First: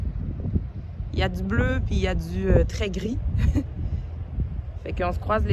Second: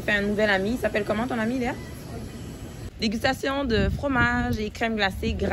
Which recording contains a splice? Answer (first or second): second